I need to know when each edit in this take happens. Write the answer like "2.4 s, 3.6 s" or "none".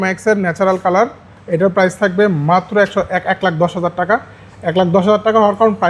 none